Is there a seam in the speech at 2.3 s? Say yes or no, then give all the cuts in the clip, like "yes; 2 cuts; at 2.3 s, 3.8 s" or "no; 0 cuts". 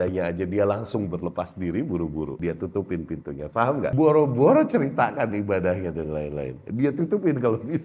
yes; 2 cuts; at 2.3 s, 3.9 s